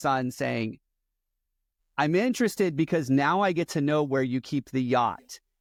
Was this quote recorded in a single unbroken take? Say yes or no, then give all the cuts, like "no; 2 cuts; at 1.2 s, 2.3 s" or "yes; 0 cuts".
yes; 0 cuts